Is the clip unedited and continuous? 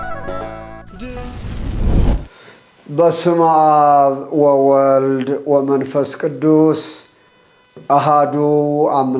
no; 2 cuts; at 1.5 s, 2.3 s

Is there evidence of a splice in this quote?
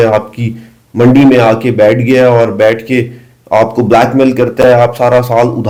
no; 0 cuts

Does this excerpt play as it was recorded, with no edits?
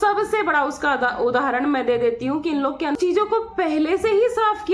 no; 1 cut; at 3.0 s

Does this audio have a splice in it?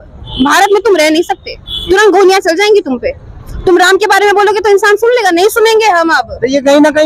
no; 0 cuts

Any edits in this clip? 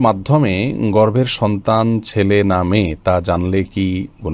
no; 0 cuts

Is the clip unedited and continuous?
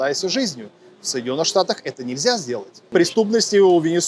no; 1 cut; at 2.9 s

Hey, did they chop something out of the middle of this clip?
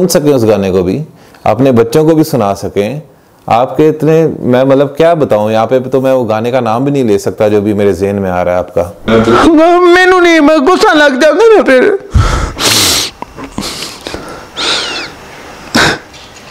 yes; 1 cut; at 9.1 s

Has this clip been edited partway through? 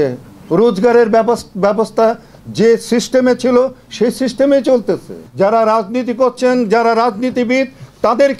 yes; 1 cut; at 5.2 s

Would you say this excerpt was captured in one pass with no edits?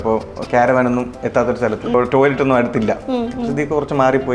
no; 1 cut; at 1.9 s

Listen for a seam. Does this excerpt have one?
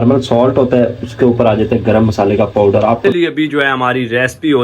yes; 1 cut; at 3.1 s

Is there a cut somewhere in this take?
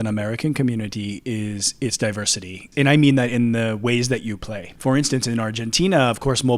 yes; 2 cuts; at 2.7 s, 4.6 s

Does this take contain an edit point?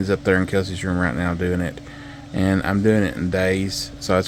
no; 0 cuts

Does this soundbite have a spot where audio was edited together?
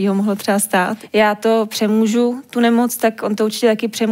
yes; 1 cut; at 1.0 s

